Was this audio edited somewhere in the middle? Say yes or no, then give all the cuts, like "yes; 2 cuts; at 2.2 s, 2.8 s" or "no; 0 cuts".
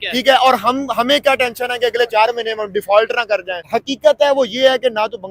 yes; 1 cut; at 3.6 s